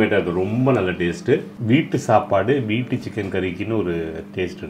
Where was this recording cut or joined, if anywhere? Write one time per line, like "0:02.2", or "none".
0:01.5